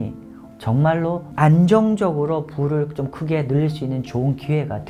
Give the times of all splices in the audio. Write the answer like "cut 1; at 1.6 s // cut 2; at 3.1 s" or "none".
none